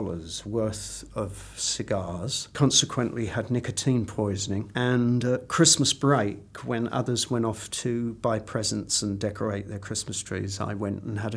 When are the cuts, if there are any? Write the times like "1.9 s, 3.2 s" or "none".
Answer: 2.4 s, 4.7 s